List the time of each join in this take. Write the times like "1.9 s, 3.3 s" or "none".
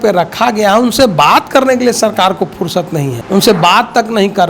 3.2 s